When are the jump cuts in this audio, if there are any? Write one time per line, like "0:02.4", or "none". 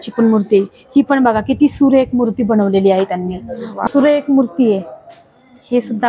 0:03.8